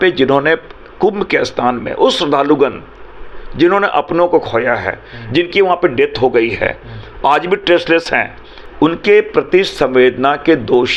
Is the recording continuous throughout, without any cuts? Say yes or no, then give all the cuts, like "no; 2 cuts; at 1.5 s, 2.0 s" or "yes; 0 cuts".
yes; 0 cuts